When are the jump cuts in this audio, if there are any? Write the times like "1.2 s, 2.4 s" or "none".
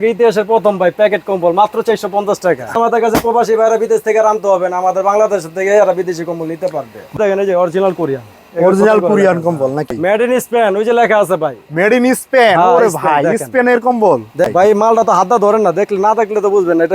2.7 s, 7.2 s, 10.0 s, 14.5 s